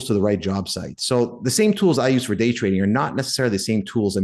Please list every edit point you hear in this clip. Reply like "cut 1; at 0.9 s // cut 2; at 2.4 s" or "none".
none